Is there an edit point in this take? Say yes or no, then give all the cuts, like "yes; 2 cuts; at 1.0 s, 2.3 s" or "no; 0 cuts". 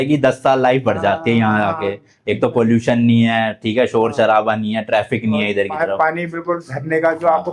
no; 0 cuts